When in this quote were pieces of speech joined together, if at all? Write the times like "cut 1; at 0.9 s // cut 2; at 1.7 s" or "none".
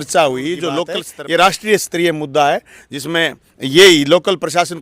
cut 1; at 1.0 s